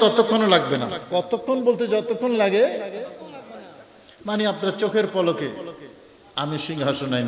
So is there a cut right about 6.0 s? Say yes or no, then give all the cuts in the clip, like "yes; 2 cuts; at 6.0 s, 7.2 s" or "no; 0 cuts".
no; 1 cut; at 1.0 s